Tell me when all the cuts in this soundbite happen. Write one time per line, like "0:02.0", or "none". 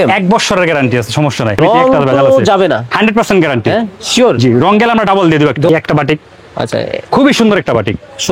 0:01.6
0:05.7